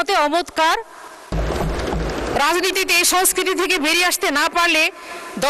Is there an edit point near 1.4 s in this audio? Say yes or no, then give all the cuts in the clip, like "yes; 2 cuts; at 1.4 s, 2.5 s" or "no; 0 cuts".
yes; 1 cut; at 1.4 s